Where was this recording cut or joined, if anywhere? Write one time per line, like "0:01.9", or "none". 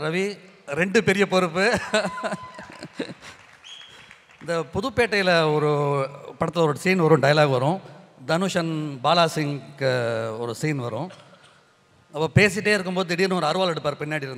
none